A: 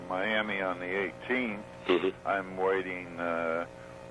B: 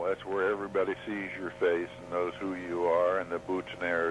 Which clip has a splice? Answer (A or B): B